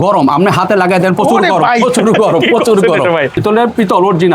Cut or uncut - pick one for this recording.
cut